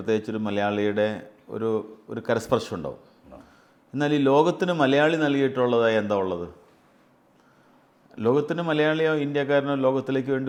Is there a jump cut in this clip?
no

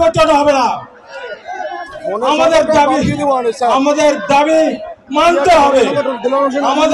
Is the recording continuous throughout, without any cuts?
yes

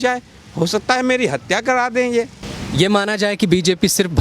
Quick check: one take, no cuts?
yes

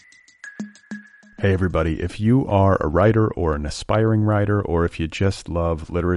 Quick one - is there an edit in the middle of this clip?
yes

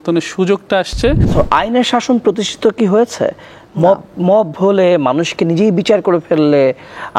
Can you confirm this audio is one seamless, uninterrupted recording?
no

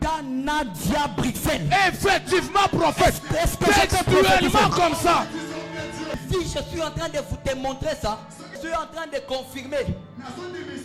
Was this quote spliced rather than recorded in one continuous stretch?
yes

